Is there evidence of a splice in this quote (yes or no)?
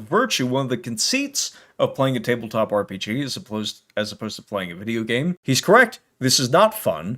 yes